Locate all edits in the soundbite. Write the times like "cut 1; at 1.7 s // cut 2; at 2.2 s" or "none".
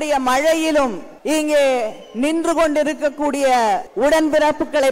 cut 1; at 1.1 s // cut 2; at 3.9 s